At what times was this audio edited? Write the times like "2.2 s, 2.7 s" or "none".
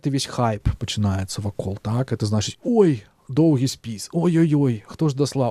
none